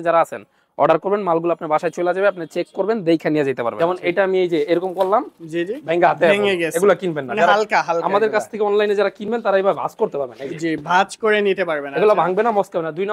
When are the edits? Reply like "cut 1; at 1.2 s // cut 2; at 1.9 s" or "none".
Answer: cut 1; at 3.7 s